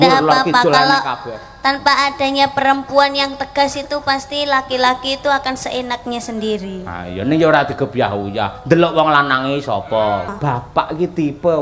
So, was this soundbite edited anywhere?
yes; 1 cut; at 10.3 s

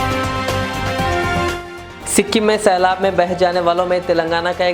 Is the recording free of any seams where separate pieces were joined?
no; 1 cut; at 1.5 s

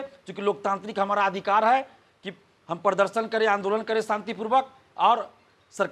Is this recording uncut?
yes; 0 cuts

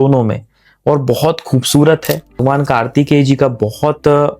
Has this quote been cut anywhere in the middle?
yes; 1 cut; at 2.4 s

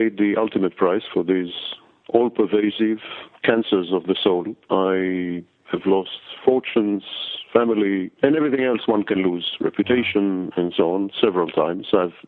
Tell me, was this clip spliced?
no; 0 cuts

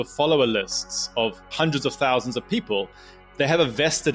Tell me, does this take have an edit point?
yes; 2 cuts; at 1.5 s, 3.2 s

